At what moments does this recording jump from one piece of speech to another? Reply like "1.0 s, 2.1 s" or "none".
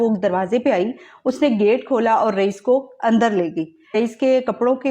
3.9 s